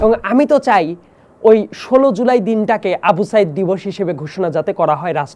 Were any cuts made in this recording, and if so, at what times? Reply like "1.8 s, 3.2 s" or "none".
none